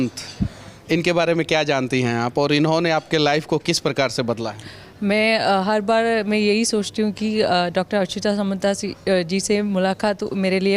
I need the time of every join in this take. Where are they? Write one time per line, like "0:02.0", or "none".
none